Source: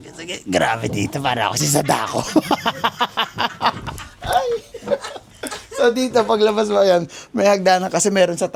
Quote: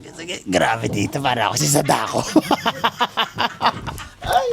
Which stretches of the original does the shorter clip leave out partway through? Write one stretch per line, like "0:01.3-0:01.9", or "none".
none